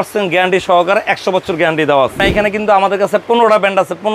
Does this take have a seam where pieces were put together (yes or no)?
yes